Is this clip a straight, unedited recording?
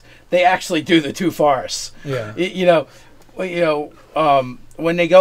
yes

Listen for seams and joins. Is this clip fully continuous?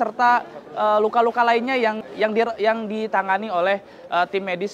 yes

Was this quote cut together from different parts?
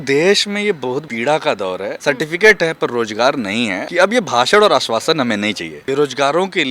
yes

